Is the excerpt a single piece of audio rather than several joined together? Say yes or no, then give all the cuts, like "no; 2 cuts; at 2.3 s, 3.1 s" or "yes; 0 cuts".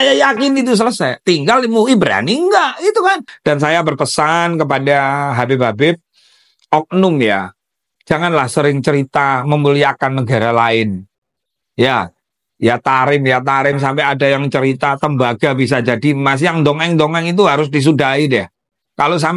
no; 1 cut; at 3.3 s